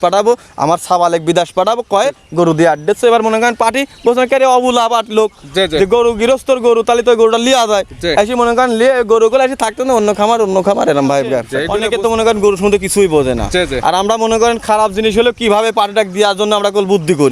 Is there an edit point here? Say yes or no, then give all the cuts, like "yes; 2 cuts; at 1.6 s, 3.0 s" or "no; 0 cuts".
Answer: yes; 1 cut; at 11.6 s